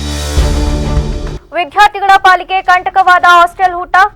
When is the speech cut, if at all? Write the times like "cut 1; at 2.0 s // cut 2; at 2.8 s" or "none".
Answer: cut 1; at 1.4 s